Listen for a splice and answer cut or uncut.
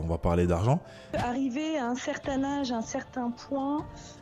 cut